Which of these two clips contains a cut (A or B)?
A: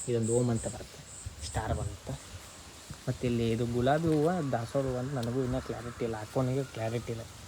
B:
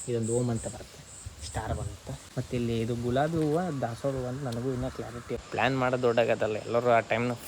B